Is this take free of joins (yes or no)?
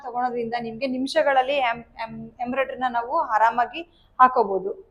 yes